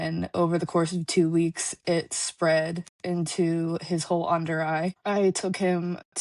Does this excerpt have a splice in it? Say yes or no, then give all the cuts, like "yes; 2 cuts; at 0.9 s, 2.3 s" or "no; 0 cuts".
no; 0 cuts